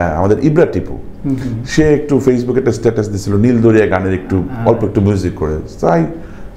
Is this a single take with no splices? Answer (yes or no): yes